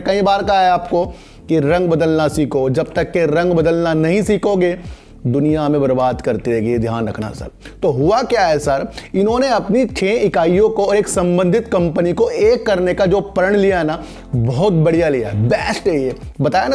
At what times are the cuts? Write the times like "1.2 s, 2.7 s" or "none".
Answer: none